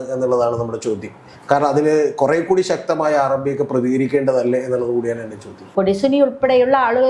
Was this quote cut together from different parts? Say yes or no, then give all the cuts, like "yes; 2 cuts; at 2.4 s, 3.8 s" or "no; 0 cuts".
yes; 1 cut; at 5.6 s